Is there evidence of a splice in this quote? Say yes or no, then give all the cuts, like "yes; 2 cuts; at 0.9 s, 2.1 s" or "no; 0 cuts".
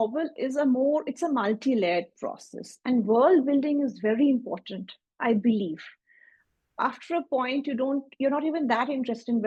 no; 0 cuts